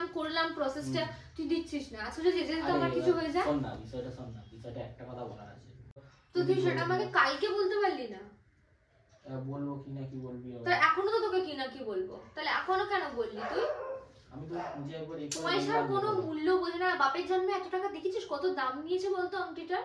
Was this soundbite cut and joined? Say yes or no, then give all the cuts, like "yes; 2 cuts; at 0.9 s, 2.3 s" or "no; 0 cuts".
yes; 1 cut; at 6.1 s